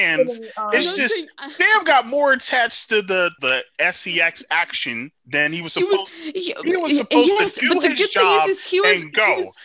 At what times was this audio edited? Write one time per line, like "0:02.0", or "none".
0:03.4
0:05.1